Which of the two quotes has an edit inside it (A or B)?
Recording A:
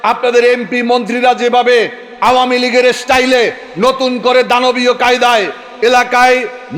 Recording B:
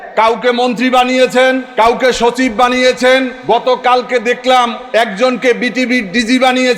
B